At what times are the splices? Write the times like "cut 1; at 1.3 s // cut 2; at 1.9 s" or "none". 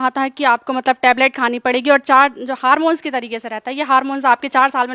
none